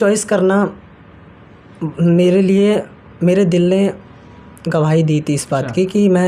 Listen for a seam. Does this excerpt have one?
no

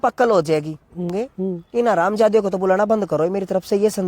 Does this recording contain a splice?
yes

